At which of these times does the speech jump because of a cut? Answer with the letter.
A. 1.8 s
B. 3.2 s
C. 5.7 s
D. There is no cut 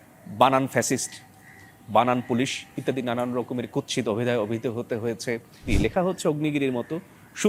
C